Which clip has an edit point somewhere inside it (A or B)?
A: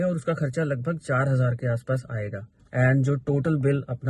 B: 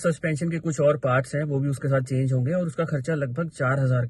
A